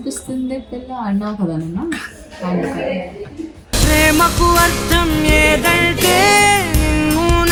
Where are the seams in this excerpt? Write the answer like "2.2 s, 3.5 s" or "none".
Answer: none